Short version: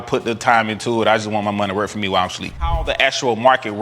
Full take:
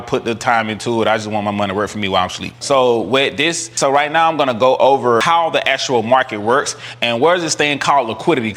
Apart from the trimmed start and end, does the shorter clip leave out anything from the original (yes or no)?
yes